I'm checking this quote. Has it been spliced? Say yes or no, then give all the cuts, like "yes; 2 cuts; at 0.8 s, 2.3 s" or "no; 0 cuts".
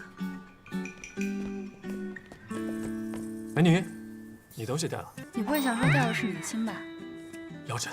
yes; 1 cut; at 5.2 s